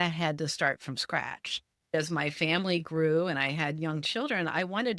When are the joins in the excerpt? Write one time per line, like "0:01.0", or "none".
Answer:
0:01.9